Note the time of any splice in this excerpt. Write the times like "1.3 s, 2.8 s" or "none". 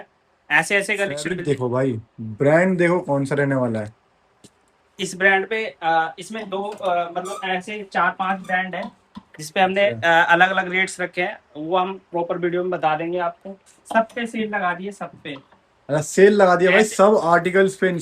none